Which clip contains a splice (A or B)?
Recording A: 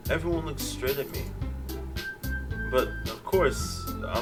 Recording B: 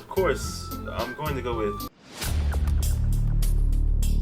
B